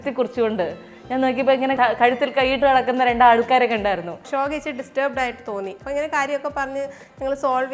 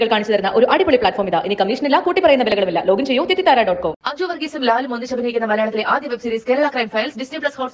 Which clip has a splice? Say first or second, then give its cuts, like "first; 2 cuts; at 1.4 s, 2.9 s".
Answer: first; 3 cuts; at 1.7 s, 4.2 s, 5.8 s